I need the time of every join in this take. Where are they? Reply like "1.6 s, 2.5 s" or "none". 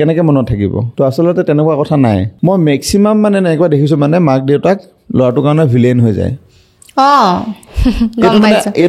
0.8 s, 2.3 s